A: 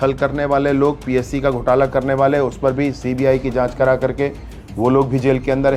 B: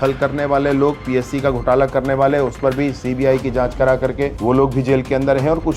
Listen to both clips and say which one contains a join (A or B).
B